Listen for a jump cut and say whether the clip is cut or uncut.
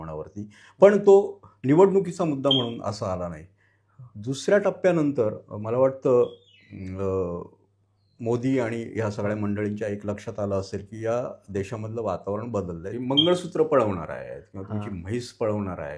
cut